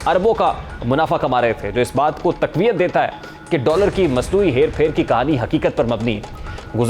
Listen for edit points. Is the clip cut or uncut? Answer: uncut